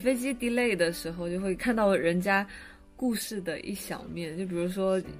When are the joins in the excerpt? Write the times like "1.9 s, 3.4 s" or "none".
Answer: 1.6 s

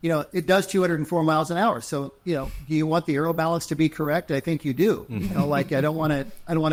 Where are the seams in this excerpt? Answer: none

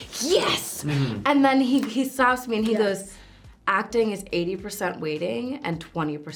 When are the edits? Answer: none

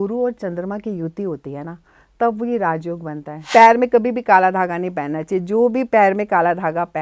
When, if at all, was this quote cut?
3.4 s

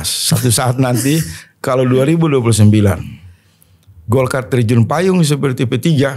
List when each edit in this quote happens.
none

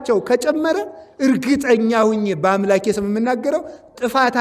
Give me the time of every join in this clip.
none

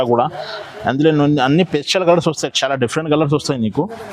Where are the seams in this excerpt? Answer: none

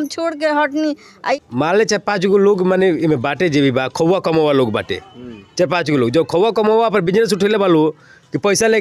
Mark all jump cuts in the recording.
1.4 s

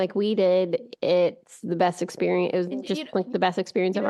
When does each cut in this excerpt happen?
none

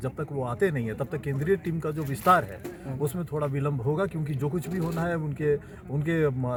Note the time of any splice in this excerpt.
none

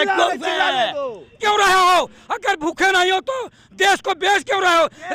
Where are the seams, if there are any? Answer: 1.4 s

